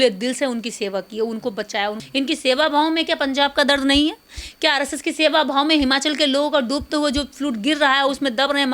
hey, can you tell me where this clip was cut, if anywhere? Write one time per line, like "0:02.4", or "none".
0:02.0